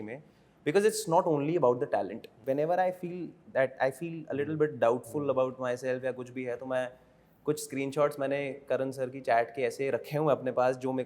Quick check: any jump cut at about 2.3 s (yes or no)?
yes